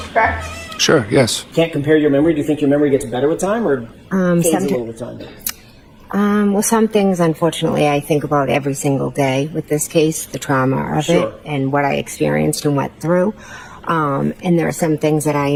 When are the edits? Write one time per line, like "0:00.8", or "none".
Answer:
none